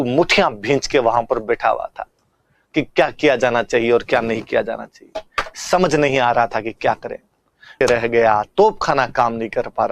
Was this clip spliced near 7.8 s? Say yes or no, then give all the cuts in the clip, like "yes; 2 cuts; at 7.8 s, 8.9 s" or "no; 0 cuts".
yes; 1 cut; at 7.8 s